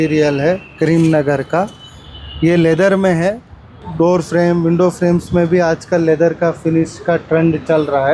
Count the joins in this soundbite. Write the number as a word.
one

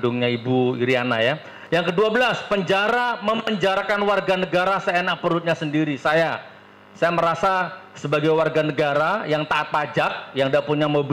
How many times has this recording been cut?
one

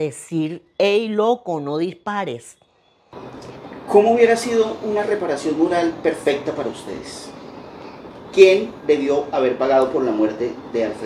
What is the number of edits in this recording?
one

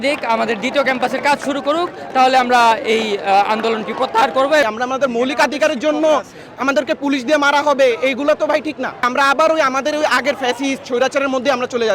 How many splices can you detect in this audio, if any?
two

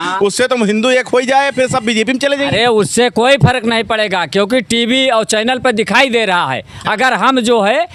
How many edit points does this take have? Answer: zero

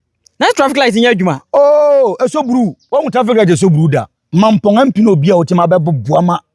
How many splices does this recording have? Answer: zero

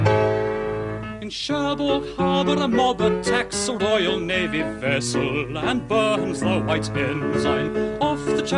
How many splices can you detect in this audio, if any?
one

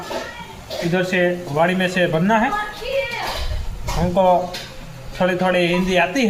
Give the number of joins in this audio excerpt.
zero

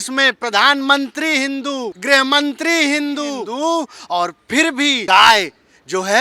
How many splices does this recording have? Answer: three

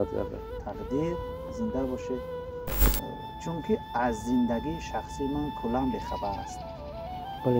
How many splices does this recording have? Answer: one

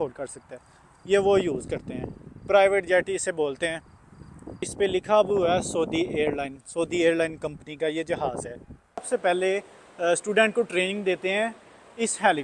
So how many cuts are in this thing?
two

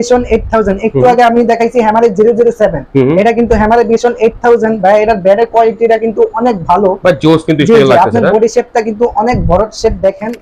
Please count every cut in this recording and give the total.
zero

